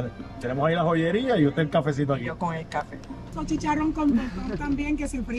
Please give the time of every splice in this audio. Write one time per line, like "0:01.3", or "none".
0:03.3